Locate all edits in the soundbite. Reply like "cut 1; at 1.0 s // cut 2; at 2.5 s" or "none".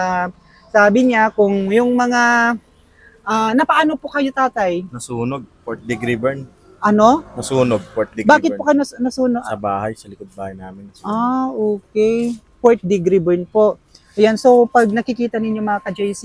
none